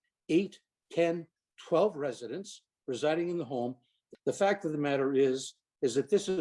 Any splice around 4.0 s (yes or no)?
yes